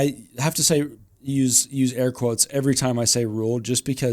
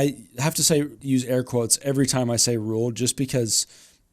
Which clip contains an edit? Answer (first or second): second